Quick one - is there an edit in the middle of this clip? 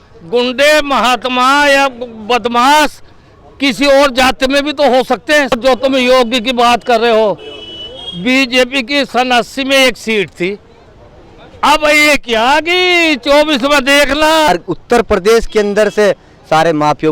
yes; 2 cuts; at 5.5 s, 14.5 s

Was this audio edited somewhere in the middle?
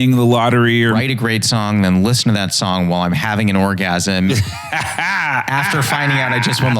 yes; 1 cut; at 1.0 s

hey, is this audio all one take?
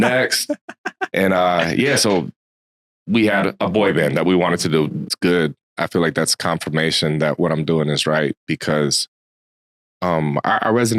no; 1 cut; at 5.1 s

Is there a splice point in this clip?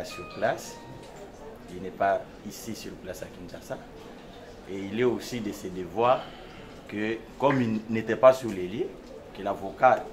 no; 0 cuts

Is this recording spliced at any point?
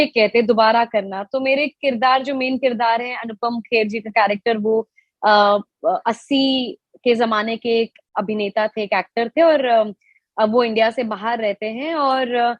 no; 0 cuts

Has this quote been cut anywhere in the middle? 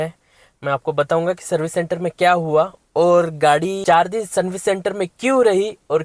yes; 1 cut; at 3.8 s

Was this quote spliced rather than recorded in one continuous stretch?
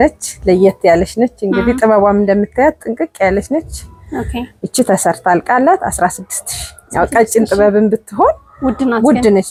no; 0 cuts

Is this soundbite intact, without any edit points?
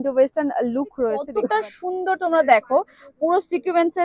no; 1 cut; at 1.3 s

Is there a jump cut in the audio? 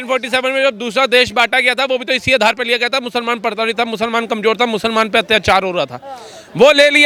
no; 0 cuts

